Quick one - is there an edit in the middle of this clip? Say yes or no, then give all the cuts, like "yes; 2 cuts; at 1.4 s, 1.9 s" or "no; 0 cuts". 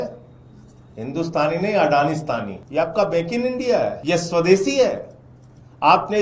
yes; 2 cuts; at 2.6 s, 4.0 s